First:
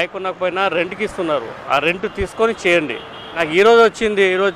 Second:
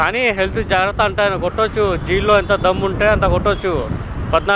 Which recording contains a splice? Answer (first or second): first